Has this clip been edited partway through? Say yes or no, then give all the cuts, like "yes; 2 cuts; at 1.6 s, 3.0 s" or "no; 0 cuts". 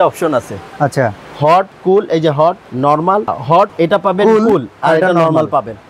no; 0 cuts